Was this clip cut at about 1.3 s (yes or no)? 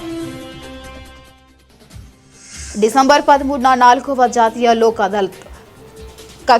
no